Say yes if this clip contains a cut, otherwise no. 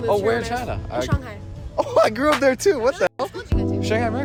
no